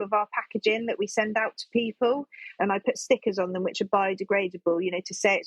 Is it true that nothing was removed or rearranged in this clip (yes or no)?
no